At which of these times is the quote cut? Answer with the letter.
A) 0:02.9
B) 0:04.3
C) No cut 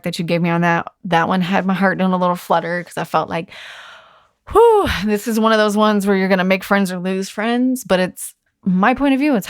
C